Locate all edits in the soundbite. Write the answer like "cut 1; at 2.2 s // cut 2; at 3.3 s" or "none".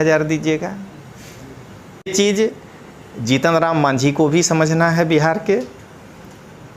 cut 1; at 2.1 s